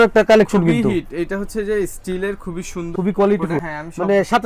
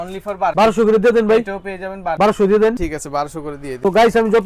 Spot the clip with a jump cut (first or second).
first